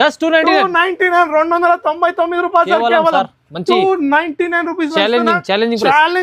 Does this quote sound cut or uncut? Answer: uncut